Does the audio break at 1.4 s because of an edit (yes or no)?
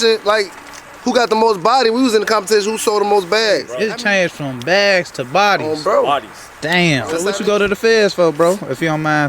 no